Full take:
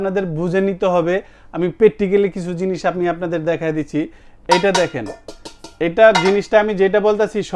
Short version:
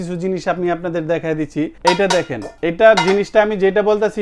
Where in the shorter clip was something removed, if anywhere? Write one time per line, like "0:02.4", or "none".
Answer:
0:01.7
0:02.4